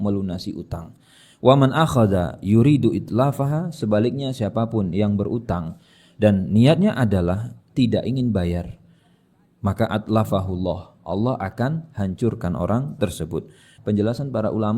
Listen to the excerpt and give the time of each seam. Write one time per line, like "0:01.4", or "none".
0:13.7